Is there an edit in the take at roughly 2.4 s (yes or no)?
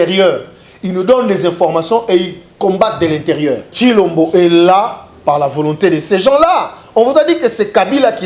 no